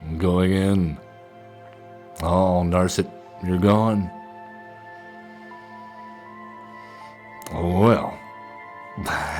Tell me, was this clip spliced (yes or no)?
no